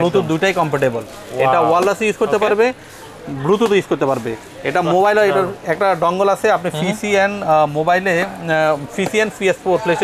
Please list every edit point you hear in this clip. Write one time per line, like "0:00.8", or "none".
none